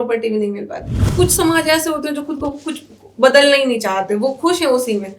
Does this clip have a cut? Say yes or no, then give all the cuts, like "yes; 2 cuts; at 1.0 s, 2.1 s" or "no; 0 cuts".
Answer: yes; 1 cut; at 1.0 s